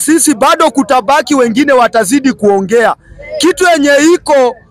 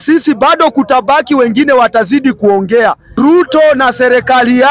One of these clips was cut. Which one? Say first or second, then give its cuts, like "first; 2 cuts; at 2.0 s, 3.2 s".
second; 1 cut; at 3.0 s